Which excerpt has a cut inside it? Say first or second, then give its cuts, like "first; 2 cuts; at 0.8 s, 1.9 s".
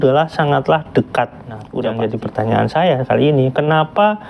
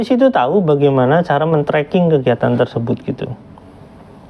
first; 1 cut; at 1.6 s